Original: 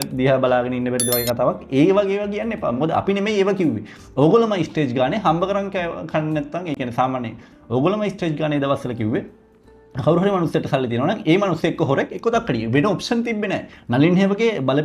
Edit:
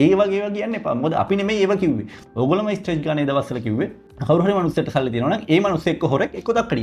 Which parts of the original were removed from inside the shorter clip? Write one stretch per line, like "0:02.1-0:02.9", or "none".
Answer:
0:03.9-0:07.5
0:09.4-0:09.8